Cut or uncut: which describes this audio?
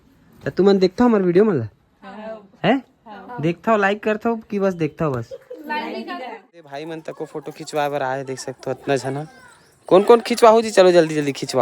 cut